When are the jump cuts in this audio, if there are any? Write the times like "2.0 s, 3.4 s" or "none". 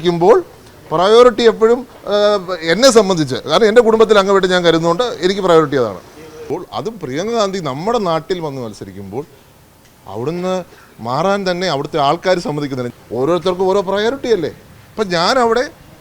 6.5 s, 12.8 s